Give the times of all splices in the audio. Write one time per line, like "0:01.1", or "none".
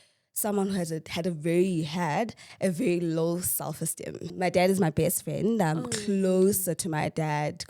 0:04.3

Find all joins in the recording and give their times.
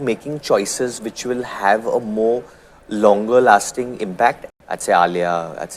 0:04.4

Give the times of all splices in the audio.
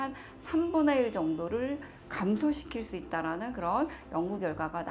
none

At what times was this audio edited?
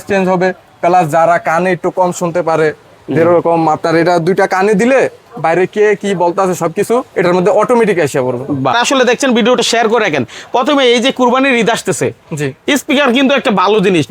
0:08.7

